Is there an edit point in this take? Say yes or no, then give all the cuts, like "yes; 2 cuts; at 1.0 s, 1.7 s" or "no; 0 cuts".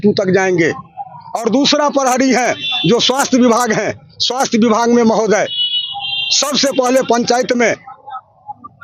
no; 0 cuts